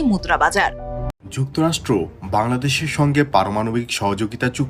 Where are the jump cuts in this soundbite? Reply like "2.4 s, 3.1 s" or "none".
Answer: 1.1 s

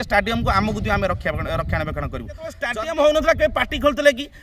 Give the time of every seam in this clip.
2.6 s

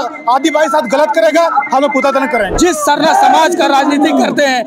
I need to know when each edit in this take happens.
2.5 s

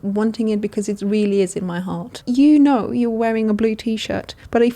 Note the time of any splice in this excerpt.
2.2 s

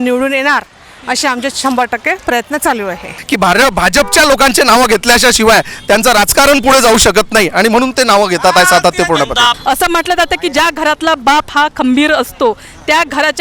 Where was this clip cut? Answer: 3.1 s, 9.5 s

